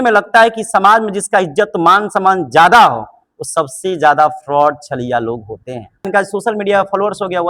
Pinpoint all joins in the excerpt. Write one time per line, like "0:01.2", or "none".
0:06.0